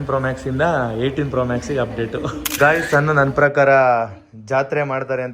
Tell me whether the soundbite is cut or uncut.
cut